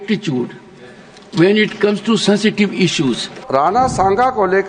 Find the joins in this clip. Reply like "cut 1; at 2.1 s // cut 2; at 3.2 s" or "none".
cut 1; at 3.3 s

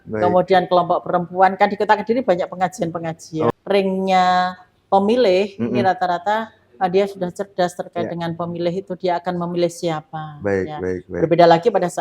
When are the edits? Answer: cut 1; at 3.5 s

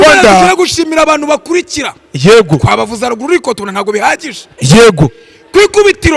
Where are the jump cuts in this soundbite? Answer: none

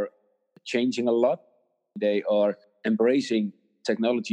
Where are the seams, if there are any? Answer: none

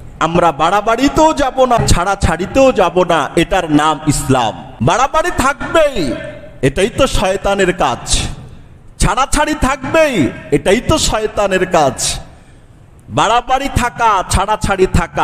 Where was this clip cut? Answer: cut 1; at 1.8 s // cut 2; at 4.7 s

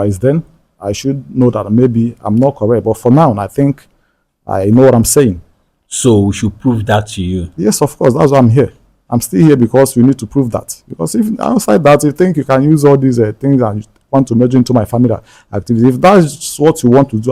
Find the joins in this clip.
none

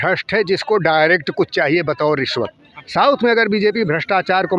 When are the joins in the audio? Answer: cut 1; at 2.7 s

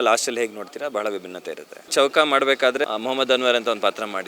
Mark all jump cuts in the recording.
cut 1; at 1.9 s // cut 2; at 2.9 s

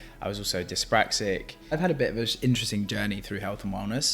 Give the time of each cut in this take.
cut 1; at 1.7 s

